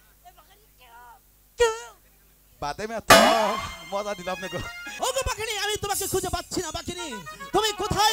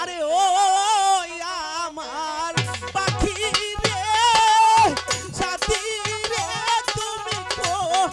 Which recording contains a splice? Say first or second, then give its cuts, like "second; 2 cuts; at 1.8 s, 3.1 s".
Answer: first; 1 cut; at 4.9 s